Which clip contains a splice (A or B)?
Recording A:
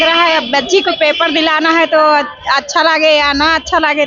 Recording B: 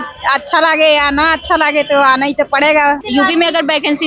B